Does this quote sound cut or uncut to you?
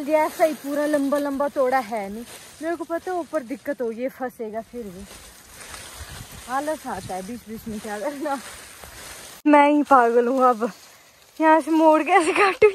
uncut